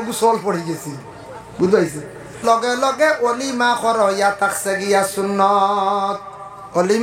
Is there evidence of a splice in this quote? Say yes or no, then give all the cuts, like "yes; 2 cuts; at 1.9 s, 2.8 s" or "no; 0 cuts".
yes; 1 cut; at 2.3 s